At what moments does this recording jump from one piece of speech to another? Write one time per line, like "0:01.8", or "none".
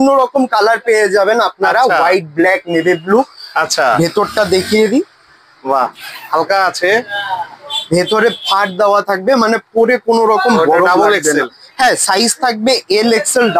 none